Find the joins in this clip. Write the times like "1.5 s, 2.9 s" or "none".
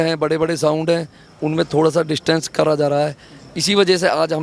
none